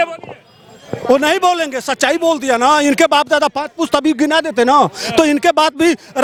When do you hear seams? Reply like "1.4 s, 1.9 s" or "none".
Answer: none